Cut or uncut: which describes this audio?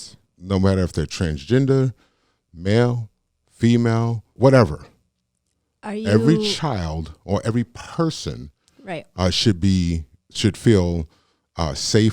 cut